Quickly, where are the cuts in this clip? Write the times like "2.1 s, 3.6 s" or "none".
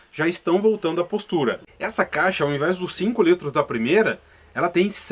1.7 s